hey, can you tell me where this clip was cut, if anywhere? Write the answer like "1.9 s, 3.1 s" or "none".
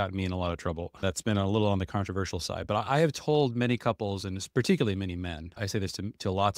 1.0 s, 5.6 s